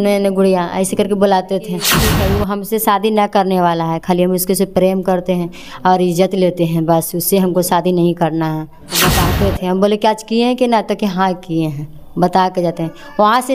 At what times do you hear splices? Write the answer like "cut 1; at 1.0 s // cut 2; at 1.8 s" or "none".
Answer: cut 1; at 2.0 s // cut 2; at 9.2 s